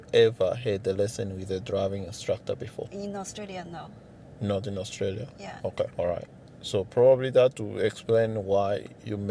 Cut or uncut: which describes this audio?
cut